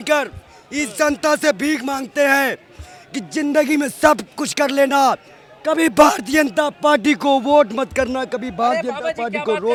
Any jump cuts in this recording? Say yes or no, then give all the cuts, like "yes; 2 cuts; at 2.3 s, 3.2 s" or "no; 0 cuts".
no; 0 cuts